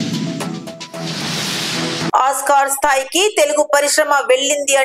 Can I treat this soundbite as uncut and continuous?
no; 1 cut; at 2.1 s

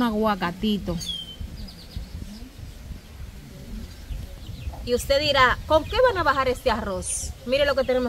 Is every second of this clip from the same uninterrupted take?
yes; 0 cuts

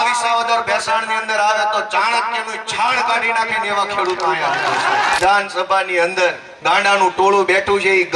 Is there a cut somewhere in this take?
yes; 2 cuts; at 5.2 s, 6.5 s

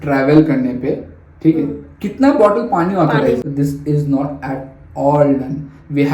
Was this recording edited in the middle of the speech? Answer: yes; 1 cut; at 3.5 s

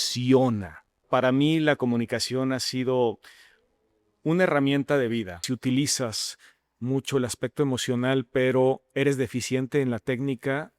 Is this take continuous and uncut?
no; 2 cuts; at 1.0 s, 5.4 s

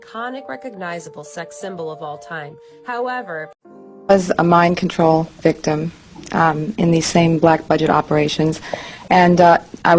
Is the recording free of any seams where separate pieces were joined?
no; 1 cut; at 3.5 s

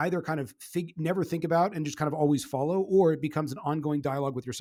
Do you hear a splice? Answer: no; 0 cuts

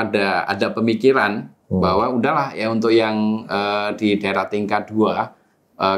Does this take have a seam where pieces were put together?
no; 0 cuts

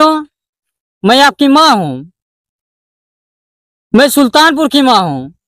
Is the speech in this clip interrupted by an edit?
no; 0 cuts

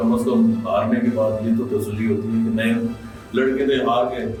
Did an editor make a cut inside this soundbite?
no; 0 cuts

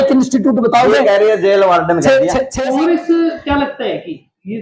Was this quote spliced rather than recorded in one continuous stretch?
yes; 1 cut; at 2.5 s

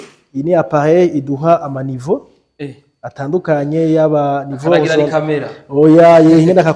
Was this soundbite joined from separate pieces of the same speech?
no; 0 cuts

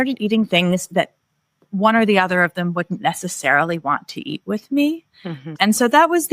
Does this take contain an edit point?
yes; 1 cut; at 5.4 s

